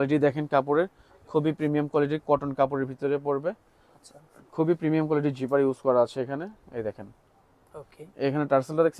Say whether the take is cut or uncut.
uncut